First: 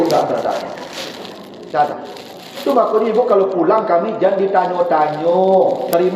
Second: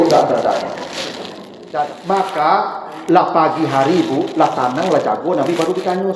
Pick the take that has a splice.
second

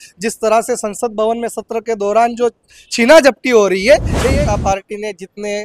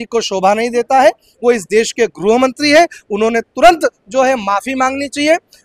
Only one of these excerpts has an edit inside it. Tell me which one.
first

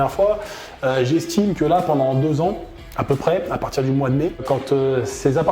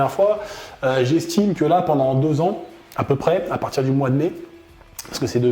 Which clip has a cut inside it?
first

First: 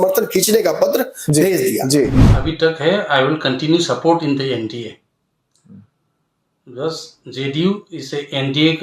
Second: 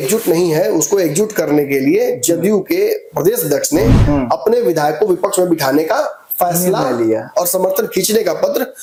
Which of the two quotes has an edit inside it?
first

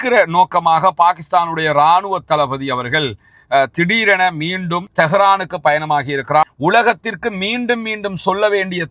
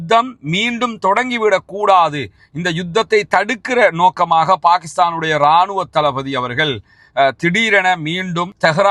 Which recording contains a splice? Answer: first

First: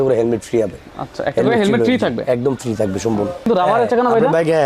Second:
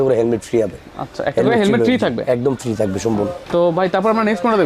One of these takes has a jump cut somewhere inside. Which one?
first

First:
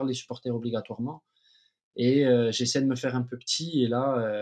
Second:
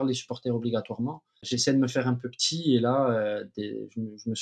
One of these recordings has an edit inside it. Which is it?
second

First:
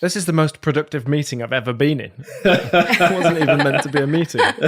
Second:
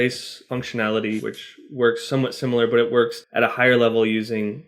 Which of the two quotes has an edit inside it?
second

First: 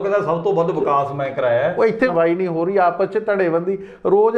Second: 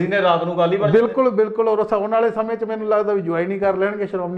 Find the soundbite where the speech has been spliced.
first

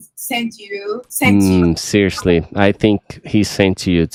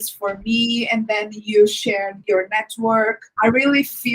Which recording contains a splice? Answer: second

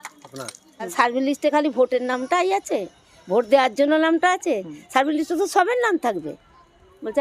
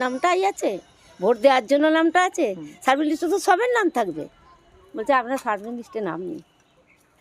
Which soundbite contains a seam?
first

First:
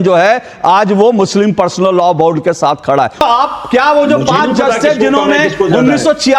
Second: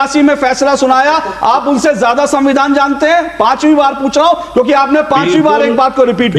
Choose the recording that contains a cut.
first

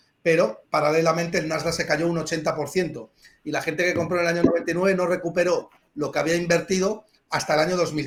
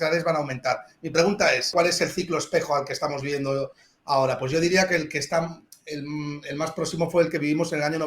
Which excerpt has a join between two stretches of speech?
second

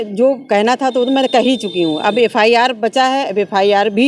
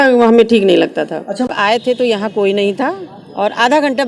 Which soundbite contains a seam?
second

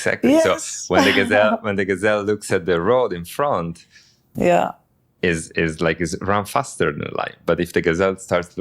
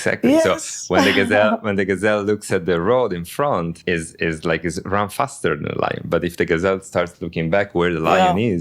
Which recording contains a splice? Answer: second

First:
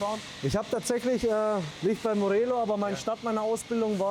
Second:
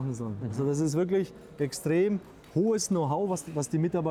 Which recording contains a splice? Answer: first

